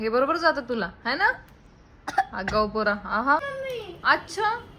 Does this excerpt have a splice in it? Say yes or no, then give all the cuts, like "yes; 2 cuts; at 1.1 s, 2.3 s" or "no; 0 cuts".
yes; 1 cut; at 3.5 s